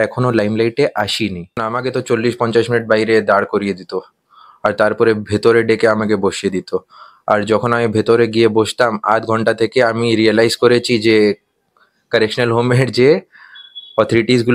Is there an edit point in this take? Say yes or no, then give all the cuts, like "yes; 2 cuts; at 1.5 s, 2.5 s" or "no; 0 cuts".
yes; 1 cut; at 1.7 s